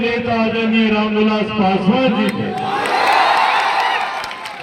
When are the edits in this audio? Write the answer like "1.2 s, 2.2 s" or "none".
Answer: none